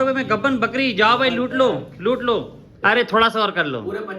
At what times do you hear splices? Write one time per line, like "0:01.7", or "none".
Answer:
0:02.7